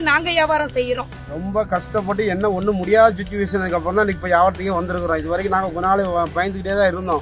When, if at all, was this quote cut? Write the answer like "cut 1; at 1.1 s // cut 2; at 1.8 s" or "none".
cut 1; at 1.2 s

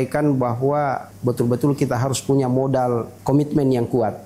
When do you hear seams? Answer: cut 1; at 1.1 s // cut 2; at 3.1 s

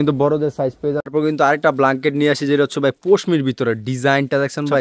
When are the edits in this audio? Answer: cut 1; at 1.1 s

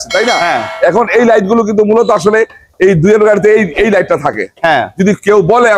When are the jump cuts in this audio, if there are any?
none

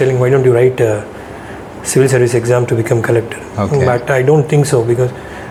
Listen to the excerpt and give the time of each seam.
none

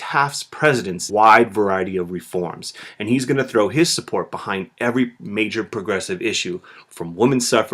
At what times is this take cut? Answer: none

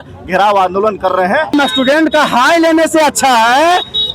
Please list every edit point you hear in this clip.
cut 1; at 1.5 s

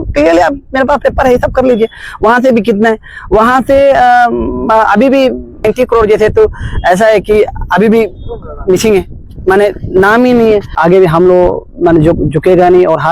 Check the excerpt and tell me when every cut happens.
cut 1; at 5.6 s // cut 2; at 10.8 s

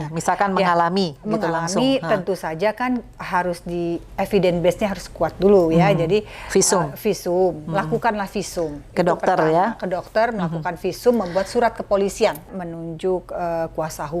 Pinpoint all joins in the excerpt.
none

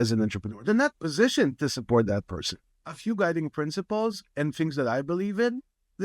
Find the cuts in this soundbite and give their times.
cut 1; at 2.7 s

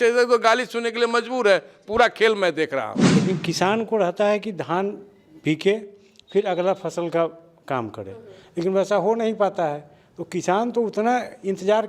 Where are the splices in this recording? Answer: cut 1; at 3.0 s

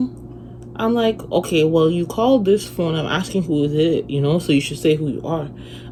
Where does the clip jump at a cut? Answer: none

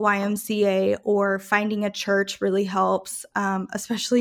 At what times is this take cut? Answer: none

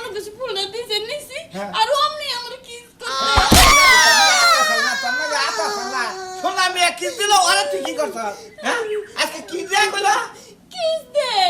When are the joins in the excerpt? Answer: none

